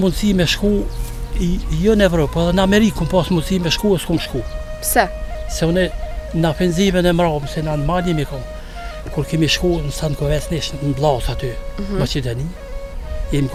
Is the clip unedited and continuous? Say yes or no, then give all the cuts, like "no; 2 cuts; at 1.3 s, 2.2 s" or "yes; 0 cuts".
yes; 0 cuts